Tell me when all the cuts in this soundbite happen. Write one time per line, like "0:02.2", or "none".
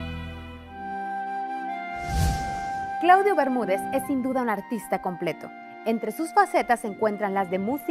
0:05.1